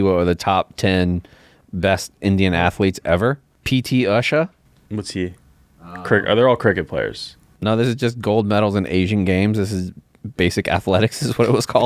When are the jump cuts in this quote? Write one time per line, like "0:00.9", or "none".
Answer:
0:03.5
0:04.7